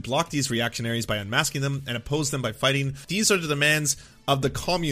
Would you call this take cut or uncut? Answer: cut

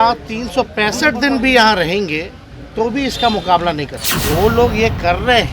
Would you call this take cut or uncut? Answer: cut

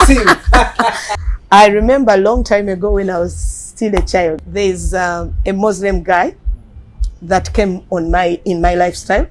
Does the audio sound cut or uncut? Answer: cut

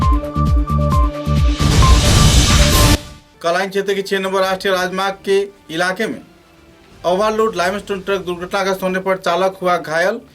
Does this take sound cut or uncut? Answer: cut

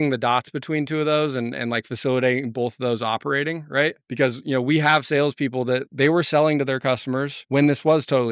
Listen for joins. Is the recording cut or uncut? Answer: cut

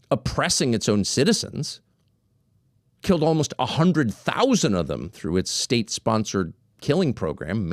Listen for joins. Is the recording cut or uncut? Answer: uncut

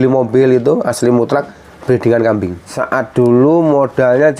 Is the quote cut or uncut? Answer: cut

